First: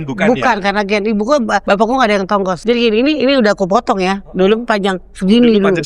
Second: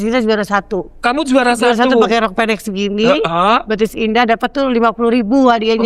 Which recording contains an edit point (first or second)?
first